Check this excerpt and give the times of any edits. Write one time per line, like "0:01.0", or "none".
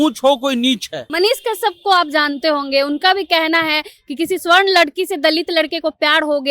0:01.0